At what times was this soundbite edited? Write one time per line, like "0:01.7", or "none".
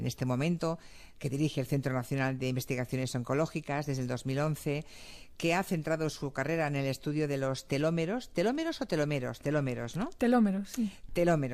0:02.0